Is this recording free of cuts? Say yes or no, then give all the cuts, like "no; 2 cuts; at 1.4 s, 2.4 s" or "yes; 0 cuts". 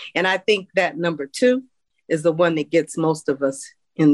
yes; 0 cuts